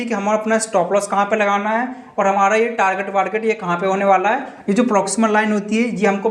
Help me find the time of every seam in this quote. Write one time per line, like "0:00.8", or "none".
none